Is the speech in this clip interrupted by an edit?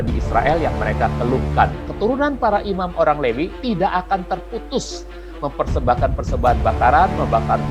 yes; 1 cut; at 1.9 s

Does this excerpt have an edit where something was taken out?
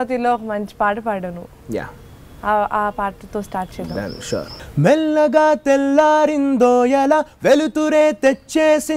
no; 0 cuts

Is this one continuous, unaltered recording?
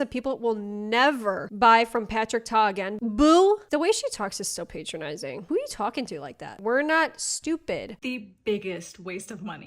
no; 3 cuts; at 2.9 s, 3.6 s, 7.9 s

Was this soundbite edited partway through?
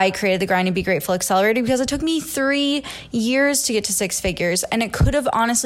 no; 0 cuts

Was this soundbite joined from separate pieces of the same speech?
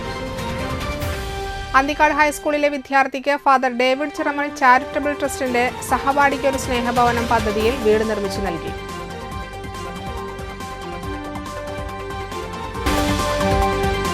yes; 1 cut; at 12.9 s

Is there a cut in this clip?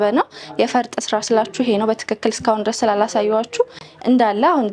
no; 0 cuts

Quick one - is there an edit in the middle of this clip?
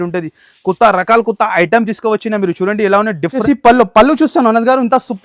yes; 1 cut; at 3.4 s

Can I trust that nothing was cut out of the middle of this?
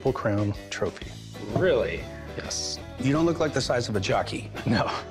yes; 0 cuts

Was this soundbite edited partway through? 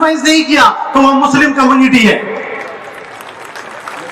no; 0 cuts

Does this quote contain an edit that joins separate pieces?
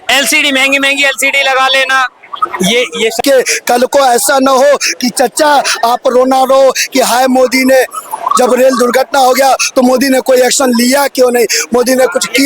yes; 1 cut; at 3.2 s

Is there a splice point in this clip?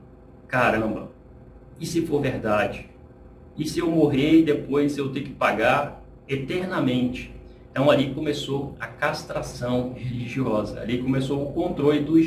no; 0 cuts

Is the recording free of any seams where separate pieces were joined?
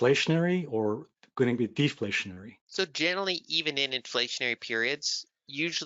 yes; 0 cuts

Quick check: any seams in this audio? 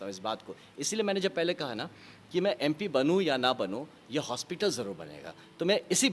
no; 0 cuts

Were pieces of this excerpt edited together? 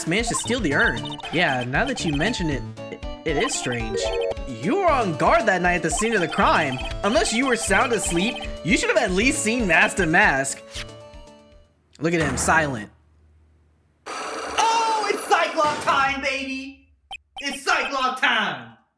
yes; 3 cuts; at 1.2 s, 4.3 s, 6.8 s

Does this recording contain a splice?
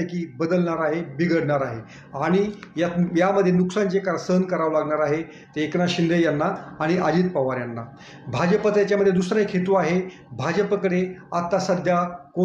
no; 0 cuts

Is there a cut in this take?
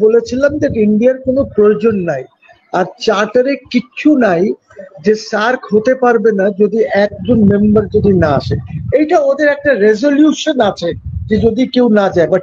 no; 0 cuts

